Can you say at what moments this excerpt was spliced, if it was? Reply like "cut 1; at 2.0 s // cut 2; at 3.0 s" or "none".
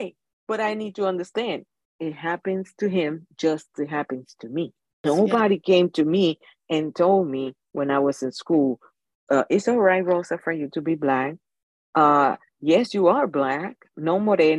cut 1; at 5.0 s